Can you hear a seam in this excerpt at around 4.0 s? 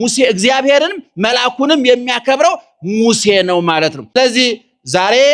yes; 1 cut; at 4.0 s

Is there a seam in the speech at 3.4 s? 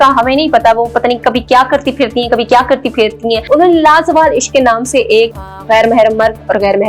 yes; 2 cuts; at 3.4 s, 5.6 s

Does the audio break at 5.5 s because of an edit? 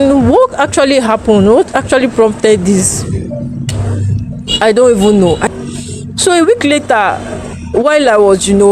yes; 1 cut; at 5.5 s

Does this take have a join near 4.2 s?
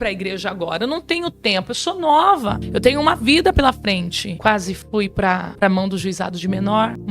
yes; 2 cuts; at 4.2 s, 5.5 s

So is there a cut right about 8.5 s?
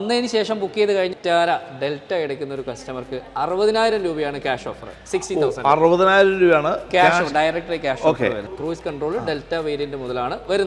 yes; 2 cuts; at 1.1 s, 8.5 s

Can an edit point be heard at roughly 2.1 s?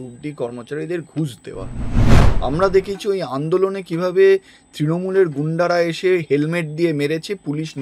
yes; 1 cut; at 2.1 s

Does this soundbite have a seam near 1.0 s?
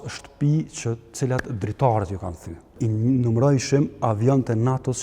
no; 1 cut; at 2.8 s

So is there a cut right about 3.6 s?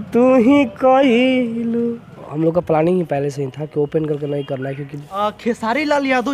no; 2 cuts; at 2.2 s, 5.0 s

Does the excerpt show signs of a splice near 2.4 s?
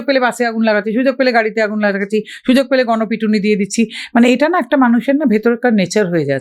no; 0 cuts

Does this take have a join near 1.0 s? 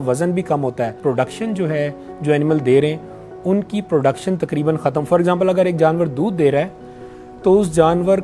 yes; 1 cut; at 1.0 s

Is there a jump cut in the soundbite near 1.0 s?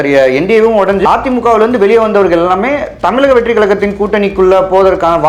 yes; 1 cut; at 1.0 s

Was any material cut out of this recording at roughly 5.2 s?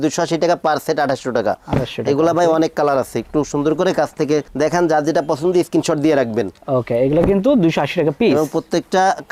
no; 0 cuts

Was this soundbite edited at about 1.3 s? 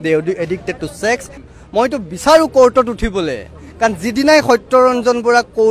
yes; 1 cut; at 1.3 s

